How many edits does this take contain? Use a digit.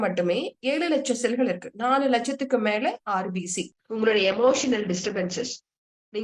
1